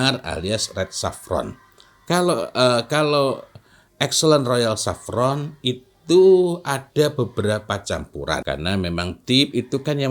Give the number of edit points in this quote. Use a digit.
1